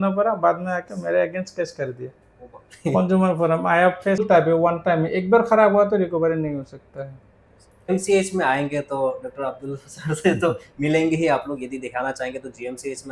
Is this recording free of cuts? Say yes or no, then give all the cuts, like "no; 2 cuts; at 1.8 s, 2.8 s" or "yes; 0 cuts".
no; 2 cuts; at 4.2 s, 7.9 s